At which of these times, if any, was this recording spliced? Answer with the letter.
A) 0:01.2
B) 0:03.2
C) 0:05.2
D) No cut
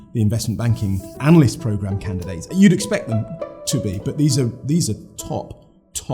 A